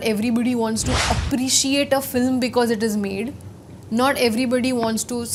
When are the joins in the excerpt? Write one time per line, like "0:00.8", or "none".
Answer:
none